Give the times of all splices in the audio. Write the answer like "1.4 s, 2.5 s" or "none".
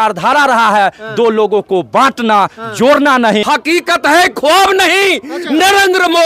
3.4 s